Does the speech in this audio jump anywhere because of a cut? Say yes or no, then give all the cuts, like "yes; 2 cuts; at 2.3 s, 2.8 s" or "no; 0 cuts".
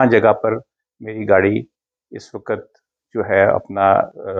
no; 0 cuts